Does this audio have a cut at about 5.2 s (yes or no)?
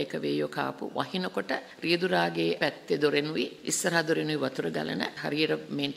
yes